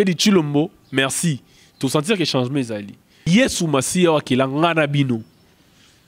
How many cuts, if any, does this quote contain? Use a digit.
1